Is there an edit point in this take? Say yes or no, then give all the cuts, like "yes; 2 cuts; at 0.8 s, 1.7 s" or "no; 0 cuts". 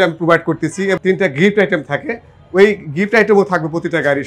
yes; 1 cut; at 1.0 s